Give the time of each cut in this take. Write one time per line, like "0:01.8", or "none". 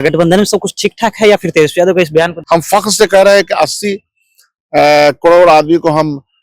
0:02.4